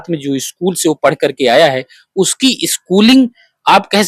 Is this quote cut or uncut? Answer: uncut